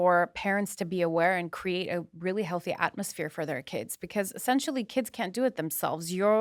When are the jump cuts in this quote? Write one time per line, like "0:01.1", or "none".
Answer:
none